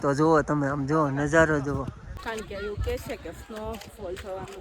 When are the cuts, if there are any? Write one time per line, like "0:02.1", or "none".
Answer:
0:02.1